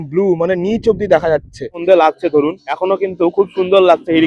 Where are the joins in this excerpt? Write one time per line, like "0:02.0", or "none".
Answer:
0:01.8
0:02.7